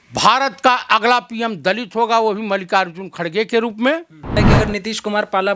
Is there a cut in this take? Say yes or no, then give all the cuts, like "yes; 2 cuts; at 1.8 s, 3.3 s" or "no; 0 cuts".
yes; 1 cut; at 4.4 s